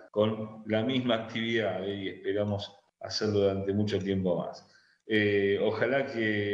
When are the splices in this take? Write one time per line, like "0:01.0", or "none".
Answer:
0:03.9